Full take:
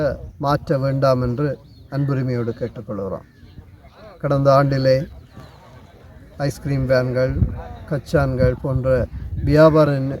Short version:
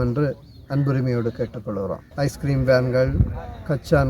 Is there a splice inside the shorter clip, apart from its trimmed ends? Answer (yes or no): yes